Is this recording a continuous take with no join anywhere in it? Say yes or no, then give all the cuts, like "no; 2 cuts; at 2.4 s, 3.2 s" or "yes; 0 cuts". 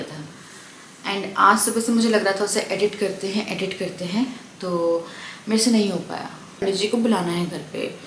no; 1 cut; at 6.6 s